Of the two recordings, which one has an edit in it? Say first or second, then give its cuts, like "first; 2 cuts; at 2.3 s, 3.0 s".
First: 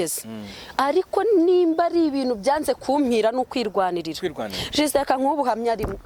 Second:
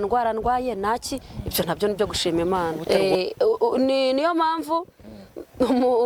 second; 1 cut; at 2.8 s